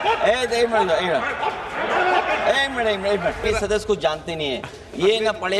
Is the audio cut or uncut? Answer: cut